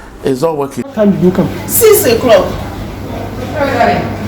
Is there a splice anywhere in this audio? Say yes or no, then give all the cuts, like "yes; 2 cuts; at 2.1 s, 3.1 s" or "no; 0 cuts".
yes; 1 cut; at 0.9 s